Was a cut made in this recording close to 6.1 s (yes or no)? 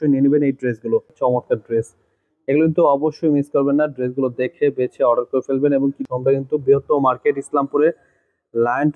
yes